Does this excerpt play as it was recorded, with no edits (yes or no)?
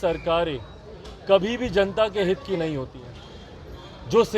yes